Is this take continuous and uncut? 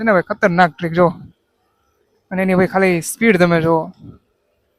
yes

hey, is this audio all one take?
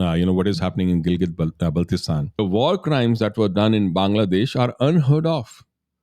no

